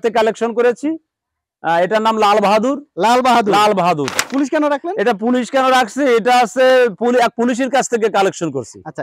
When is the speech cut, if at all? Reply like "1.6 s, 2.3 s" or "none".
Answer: 4.3 s